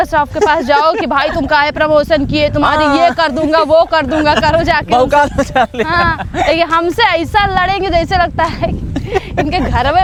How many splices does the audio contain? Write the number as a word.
zero